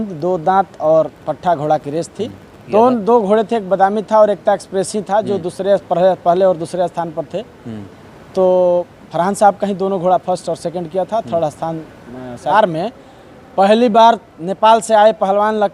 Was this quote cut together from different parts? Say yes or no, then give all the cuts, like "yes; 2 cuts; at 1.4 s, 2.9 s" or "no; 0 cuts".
yes; 2 cuts; at 2.7 s, 12.5 s